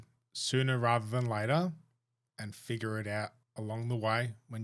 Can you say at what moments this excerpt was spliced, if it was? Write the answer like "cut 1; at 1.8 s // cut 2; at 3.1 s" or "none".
cut 1; at 3.4 s